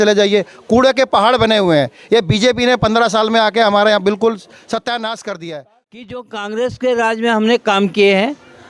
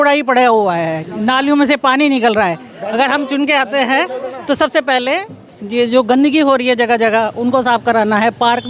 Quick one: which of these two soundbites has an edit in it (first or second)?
first